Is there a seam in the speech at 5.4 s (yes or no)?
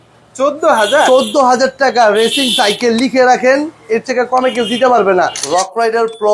yes